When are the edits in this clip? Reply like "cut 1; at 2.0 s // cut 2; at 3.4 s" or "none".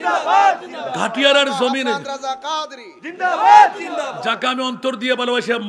none